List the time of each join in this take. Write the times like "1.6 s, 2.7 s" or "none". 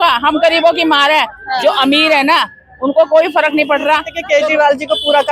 4.1 s